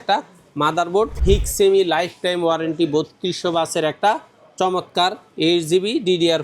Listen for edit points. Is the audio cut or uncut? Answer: cut